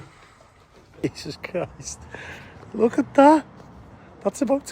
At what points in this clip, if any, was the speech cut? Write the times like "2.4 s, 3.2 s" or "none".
1.0 s